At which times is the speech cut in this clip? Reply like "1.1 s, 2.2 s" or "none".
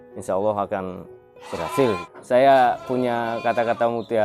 2.1 s

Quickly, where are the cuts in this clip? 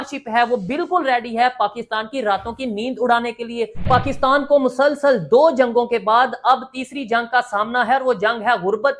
3.9 s

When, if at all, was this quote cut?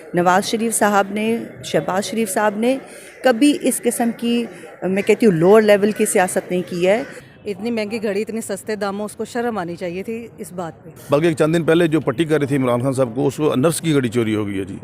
7.2 s, 10.9 s

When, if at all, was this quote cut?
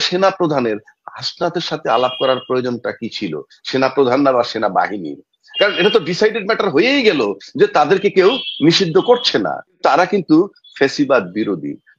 9.8 s

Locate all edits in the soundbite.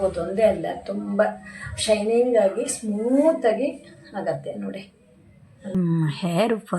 5.7 s

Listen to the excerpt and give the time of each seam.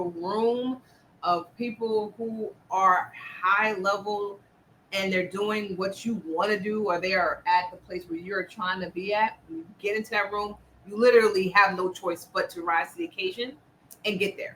none

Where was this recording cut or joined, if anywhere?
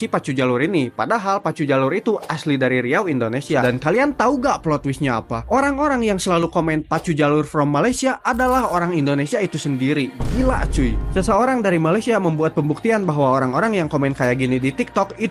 3.6 s

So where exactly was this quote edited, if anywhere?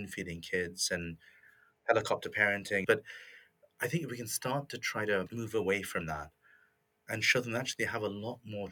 2.7 s, 5.3 s

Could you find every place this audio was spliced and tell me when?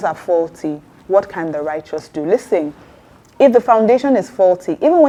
none

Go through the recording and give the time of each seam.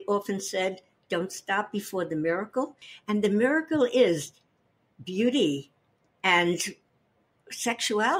2.9 s

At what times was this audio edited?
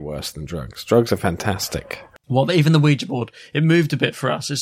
1.7 s

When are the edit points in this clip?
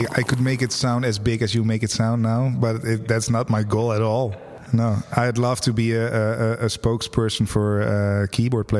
4.6 s

